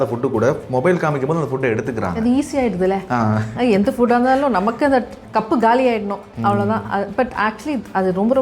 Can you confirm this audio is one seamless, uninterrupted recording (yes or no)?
no